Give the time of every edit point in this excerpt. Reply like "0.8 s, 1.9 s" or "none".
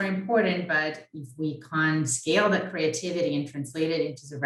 none